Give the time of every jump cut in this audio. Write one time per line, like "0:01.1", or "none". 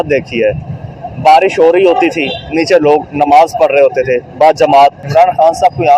0:05.0